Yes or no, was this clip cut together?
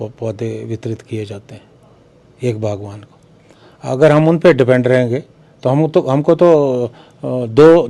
no